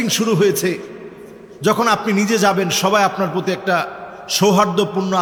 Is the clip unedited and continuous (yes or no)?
yes